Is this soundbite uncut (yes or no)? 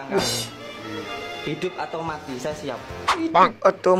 yes